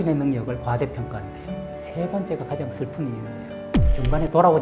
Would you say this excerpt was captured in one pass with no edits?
no; 1 cut; at 1.7 s

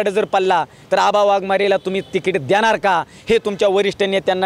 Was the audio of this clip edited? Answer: no; 0 cuts

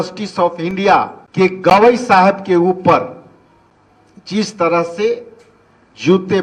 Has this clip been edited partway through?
yes; 1 cut; at 1.2 s

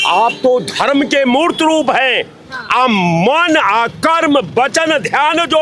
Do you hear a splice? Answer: no; 0 cuts

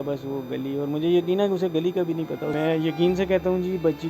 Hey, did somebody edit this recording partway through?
yes; 1 cut; at 2.5 s

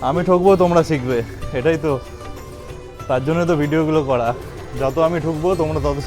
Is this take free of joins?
yes; 0 cuts

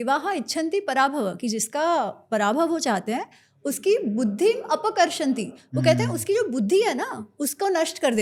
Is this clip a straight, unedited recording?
yes; 0 cuts

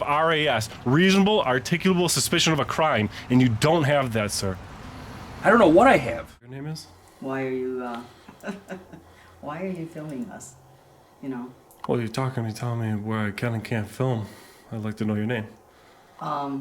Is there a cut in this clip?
yes; 1 cut; at 6.6 s

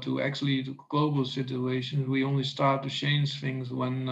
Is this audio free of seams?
yes; 0 cuts

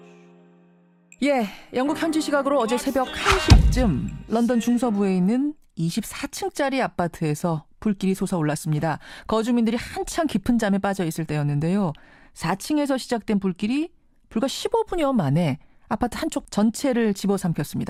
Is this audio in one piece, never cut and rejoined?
yes; 0 cuts

